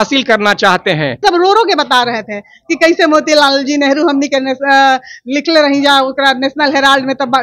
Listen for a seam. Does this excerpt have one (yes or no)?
yes